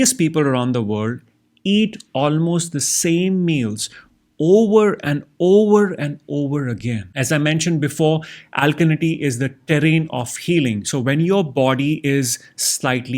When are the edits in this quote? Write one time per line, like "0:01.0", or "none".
0:07.1